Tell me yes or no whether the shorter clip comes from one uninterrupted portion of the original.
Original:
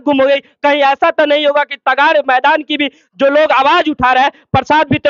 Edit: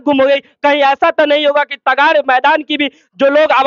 yes